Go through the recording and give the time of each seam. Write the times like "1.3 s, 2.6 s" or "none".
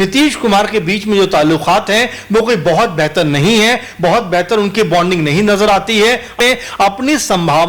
6.4 s